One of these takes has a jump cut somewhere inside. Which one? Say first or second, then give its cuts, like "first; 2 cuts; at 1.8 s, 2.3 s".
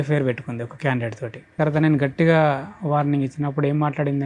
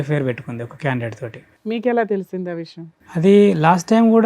first; 1 cut; at 1.5 s